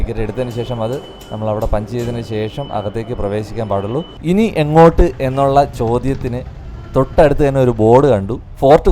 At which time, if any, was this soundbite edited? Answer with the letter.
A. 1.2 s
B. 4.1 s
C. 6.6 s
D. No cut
B